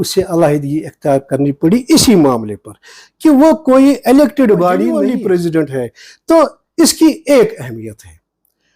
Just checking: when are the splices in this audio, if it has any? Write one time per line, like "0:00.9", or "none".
0:04.9